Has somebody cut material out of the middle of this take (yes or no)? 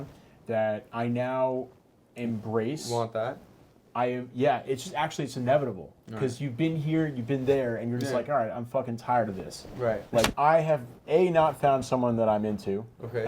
yes